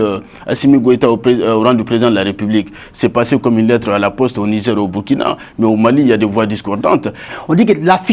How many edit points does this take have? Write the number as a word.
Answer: one